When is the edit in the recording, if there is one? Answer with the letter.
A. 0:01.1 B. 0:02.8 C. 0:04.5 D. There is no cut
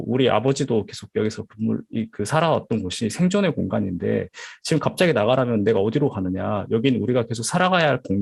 D